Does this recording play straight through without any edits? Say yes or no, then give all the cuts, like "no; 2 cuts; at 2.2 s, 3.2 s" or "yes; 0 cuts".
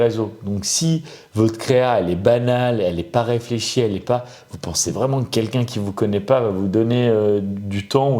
yes; 0 cuts